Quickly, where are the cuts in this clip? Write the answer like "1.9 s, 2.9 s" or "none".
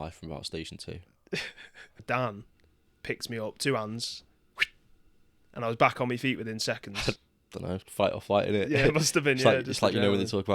2.0 s, 6.9 s